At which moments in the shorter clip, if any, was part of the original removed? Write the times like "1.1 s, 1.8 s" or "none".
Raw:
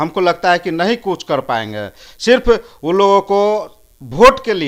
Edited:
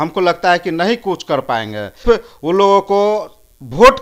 2.0 s